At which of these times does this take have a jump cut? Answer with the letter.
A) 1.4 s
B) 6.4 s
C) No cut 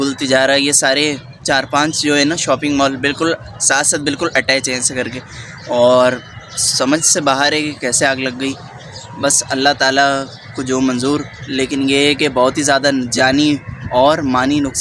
C